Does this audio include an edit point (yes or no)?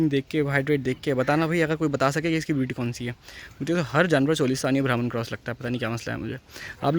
no